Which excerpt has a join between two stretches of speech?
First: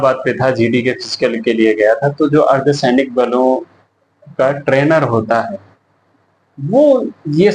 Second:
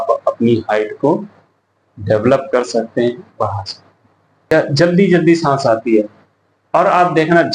second; 1 cut; at 4.5 s

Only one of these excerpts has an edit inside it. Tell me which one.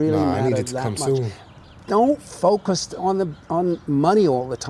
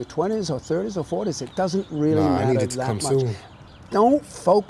second; 1 cut; at 0.9 s

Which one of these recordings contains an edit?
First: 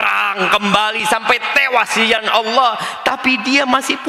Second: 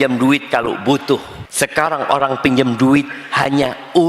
second; 1 cut; at 1.4 s

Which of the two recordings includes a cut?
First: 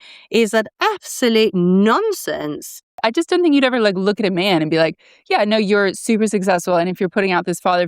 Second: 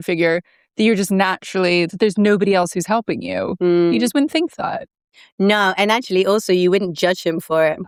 first; 1 cut; at 2.9 s

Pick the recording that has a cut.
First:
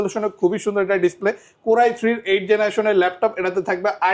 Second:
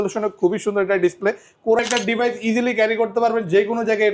second; 1 cut; at 1.8 s

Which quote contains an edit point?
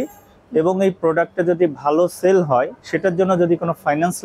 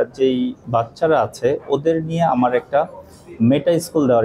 first; 1 cut; at 2.8 s

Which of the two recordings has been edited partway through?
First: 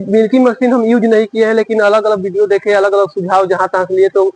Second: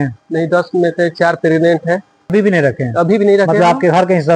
second; 1 cut; at 2.2 s

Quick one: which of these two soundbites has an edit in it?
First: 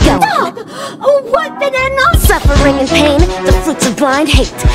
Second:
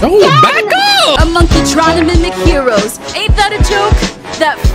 first; 1 cut; at 2.2 s

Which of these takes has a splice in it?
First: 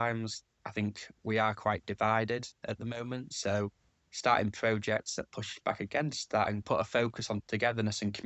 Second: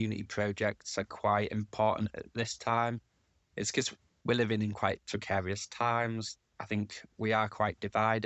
first; 1 cut; at 6.6 s

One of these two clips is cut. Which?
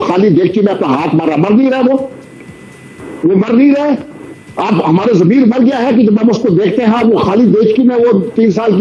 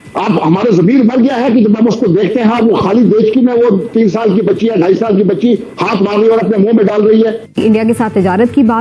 second; 1 cut; at 7.6 s

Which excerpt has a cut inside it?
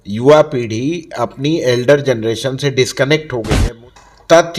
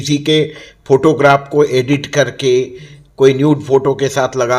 first; 1 cut; at 3.5 s

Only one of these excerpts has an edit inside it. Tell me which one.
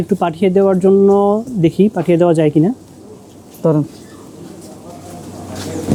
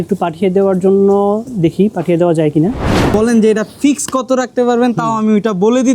second; 1 cut; at 3.1 s

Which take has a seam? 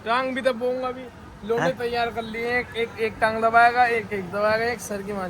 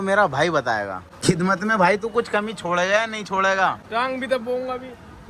second; 1 cut; at 1.1 s

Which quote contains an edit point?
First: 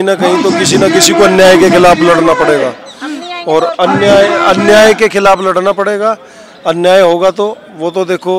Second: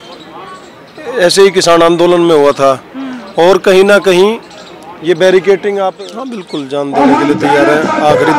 second; 1 cut; at 6.0 s

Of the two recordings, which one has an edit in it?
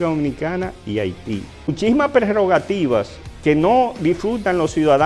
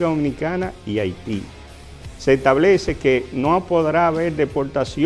first; 1 cut; at 1.6 s

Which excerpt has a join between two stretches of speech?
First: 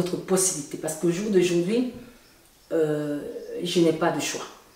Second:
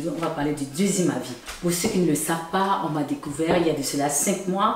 second; 1 cut; at 1.4 s

